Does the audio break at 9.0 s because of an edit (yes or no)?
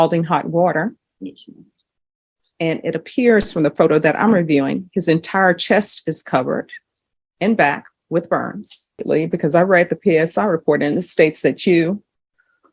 yes